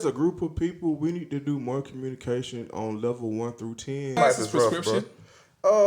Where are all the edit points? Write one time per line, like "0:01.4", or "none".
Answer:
0:04.2